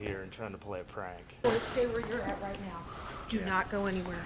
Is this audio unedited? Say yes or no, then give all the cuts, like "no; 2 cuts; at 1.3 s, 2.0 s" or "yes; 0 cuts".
no; 1 cut; at 1.3 s